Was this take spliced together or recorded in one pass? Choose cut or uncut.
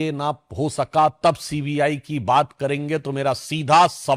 uncut